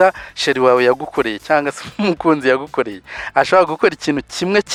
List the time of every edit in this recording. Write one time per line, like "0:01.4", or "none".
none